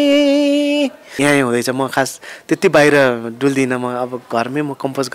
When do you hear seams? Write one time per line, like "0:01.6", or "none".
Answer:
0:01.0